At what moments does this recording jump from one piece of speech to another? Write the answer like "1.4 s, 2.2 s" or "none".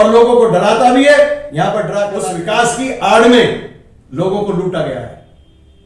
2.2 s

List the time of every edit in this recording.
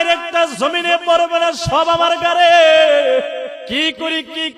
3.6 s

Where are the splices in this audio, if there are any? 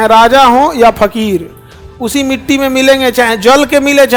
none

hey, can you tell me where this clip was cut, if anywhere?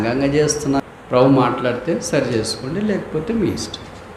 1.0 s

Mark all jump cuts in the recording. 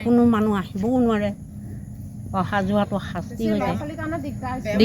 none

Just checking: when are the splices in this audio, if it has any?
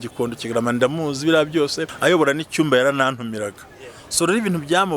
1.9 s

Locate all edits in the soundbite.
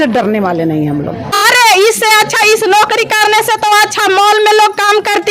1.3 s

